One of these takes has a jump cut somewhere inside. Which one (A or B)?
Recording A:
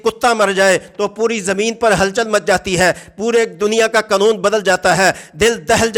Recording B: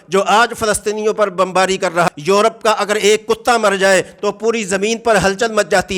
B